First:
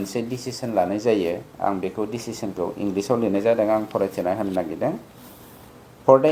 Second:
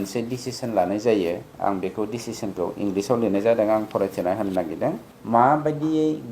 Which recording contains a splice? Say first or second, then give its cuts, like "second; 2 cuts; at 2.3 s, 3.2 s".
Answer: second; 1 cut; at 5.1 s